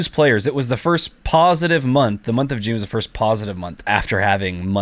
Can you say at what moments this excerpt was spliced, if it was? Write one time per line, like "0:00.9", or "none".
0:03.9